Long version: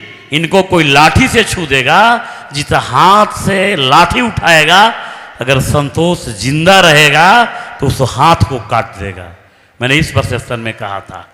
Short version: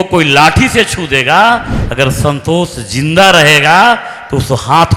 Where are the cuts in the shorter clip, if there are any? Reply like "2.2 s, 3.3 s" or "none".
1.8 s